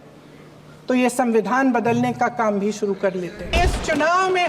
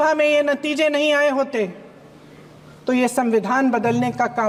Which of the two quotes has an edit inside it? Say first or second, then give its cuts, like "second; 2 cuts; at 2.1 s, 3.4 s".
first; 1 cut; at 3.5 s